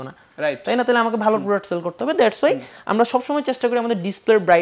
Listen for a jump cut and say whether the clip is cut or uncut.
uncut